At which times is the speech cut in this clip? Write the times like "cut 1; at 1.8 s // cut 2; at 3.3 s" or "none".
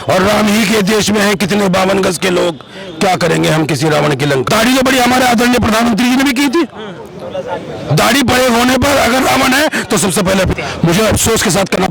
cut 1; at 4.4 s // cut 2; at 10.5 s